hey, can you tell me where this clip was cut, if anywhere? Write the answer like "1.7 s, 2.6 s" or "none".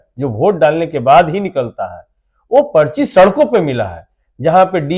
none